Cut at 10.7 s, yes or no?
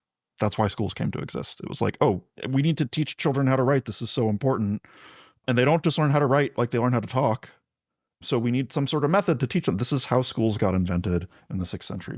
no